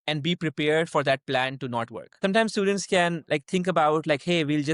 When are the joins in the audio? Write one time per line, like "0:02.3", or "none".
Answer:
0:02.2